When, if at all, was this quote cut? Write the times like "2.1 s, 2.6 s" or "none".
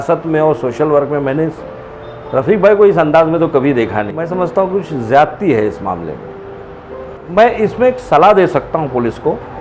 4.2 s, 7.2 s